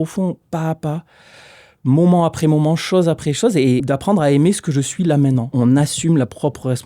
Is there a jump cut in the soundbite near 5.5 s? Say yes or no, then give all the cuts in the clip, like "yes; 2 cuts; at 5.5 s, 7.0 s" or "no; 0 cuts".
yes; 2 cuts; at 3.8 s, 5.5 s